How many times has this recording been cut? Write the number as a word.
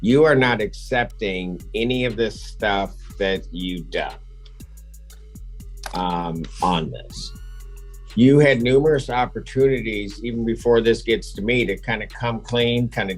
zero